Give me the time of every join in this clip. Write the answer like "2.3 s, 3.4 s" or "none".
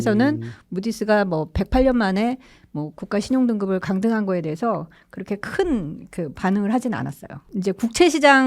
7.4 s